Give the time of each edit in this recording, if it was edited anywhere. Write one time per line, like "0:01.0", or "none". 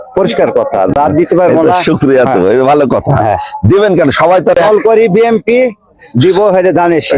none